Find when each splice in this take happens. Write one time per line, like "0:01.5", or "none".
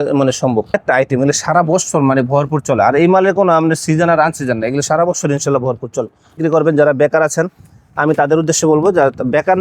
0:00.7
0:06.4